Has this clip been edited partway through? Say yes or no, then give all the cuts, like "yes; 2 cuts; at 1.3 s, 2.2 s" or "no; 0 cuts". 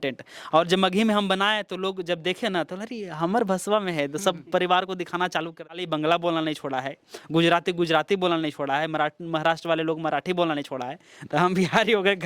yes; 1 cut; at 5.8 s